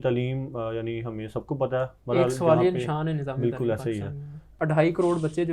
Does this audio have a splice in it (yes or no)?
yes